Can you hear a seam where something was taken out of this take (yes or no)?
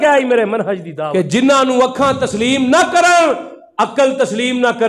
yes